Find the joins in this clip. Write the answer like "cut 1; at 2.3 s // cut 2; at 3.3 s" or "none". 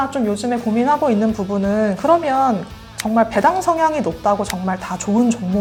none